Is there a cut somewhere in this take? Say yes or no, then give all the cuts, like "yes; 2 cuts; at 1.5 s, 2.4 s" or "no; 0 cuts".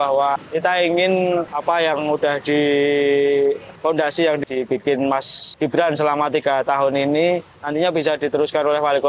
yes; 3 cuts; at 4.4 s, 5.4 s, 7.6 s